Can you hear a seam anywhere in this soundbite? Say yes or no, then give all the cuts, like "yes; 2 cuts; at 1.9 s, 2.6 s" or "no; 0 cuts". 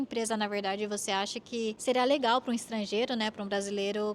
yes; 1 cut; at 1.8 s